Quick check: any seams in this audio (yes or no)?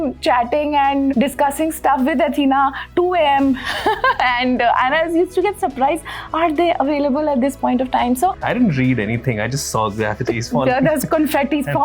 yes